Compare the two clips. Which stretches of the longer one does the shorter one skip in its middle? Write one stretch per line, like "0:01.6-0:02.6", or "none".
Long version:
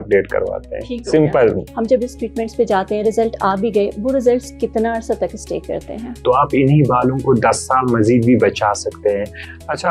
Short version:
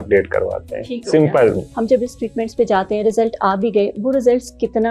none